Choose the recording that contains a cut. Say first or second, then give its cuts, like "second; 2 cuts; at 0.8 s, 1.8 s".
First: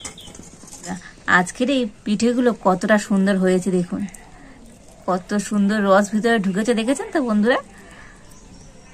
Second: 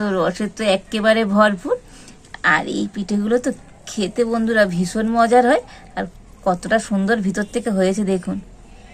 first; 2 cuts; at 1.0 s, 2.0 s